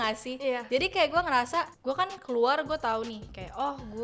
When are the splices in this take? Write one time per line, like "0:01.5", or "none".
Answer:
0:01.7